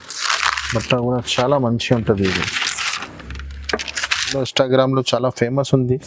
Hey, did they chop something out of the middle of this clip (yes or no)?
yes